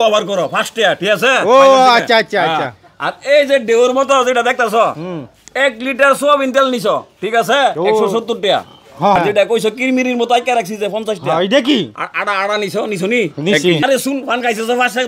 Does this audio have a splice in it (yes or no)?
yes